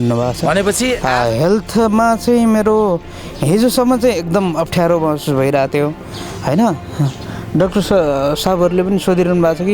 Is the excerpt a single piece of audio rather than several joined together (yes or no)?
no